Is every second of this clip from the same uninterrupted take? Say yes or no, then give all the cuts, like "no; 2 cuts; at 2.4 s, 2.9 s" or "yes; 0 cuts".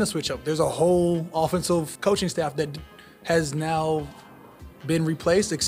yes; 0 cuts